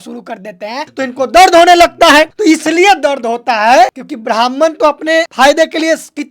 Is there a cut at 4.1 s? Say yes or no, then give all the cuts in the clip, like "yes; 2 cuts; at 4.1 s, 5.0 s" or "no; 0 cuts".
yes; 3 cuts; at 0.9 s, 4.1 s, 5.3 s